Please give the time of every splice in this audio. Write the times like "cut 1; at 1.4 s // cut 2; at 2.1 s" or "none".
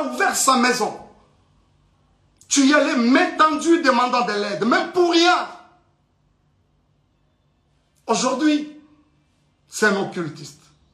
none